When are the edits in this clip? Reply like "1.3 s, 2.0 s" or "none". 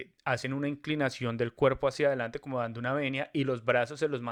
none